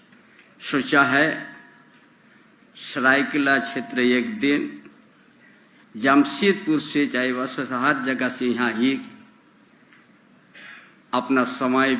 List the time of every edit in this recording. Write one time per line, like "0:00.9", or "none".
none

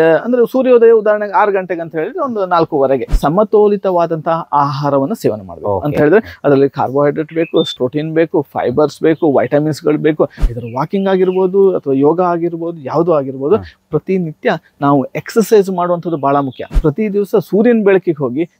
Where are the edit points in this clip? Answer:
0:03.1
0:10.4
0:16.7

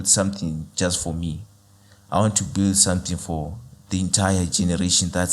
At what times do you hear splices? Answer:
none

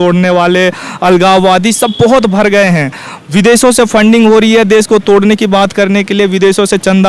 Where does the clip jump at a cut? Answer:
none

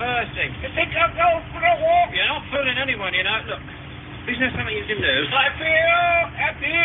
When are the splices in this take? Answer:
0:02.4

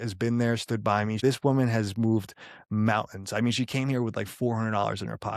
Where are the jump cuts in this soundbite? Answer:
0:01.2

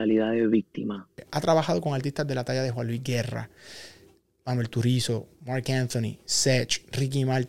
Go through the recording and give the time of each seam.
0:01.2

